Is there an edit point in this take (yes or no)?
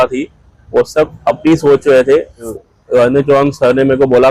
yes